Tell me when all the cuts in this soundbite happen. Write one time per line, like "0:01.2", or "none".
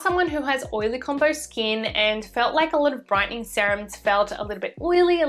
none